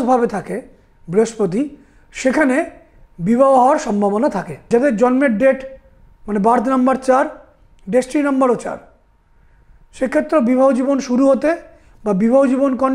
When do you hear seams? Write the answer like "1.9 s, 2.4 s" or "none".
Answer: 4.5 s